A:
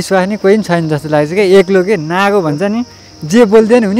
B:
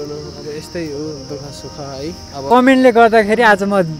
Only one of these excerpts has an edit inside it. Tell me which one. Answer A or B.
B